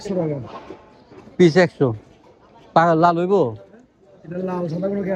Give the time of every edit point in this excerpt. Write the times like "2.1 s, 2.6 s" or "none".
none